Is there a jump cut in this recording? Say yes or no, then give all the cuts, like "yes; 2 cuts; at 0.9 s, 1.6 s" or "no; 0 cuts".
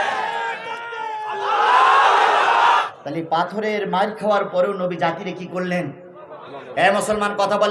yes; 1 cut; at 2.9 s